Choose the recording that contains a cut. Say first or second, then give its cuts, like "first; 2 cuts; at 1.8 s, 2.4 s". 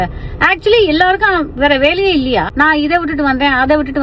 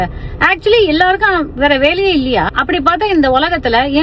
first; 1 cut; at 2.5 s